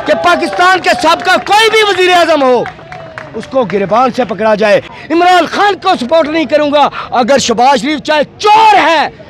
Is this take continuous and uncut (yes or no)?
no